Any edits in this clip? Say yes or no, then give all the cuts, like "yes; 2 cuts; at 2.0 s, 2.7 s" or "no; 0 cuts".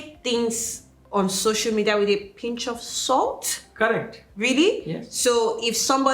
no; 0 cuts